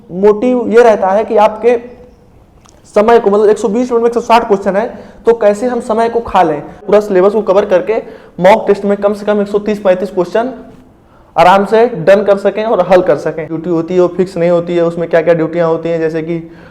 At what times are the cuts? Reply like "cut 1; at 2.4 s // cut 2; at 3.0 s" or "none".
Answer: cut 1; at 6.8 s // cut 2; at 13.6 s